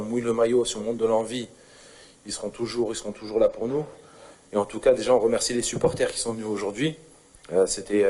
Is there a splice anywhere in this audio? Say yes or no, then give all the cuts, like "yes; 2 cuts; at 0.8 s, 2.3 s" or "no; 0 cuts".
no; 0 cuts